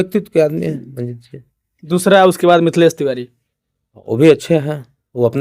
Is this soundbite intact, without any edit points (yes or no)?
yes